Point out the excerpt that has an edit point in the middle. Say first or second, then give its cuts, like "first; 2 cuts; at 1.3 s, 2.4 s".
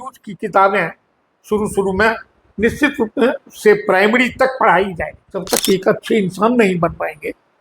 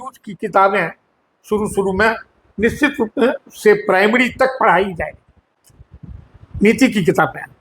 first; 1 cut; at 5.5 s